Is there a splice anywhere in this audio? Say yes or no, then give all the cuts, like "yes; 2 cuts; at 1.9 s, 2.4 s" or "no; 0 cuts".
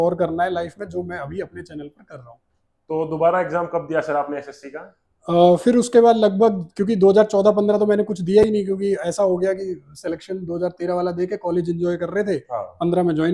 no; 0 cuts